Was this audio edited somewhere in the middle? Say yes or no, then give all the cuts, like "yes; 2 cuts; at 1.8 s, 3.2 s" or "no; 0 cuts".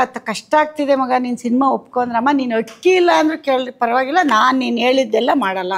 no; 0 cuts